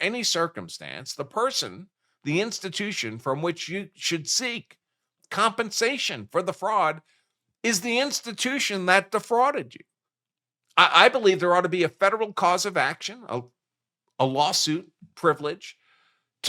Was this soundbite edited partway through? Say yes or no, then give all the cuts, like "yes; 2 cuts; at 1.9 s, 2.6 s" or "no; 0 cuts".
no; 0 cuts